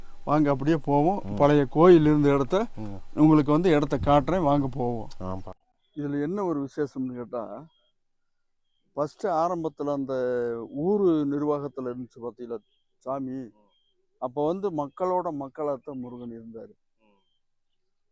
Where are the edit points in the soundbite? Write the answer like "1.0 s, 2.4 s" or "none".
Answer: none